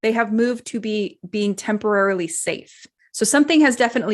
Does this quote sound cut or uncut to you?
cut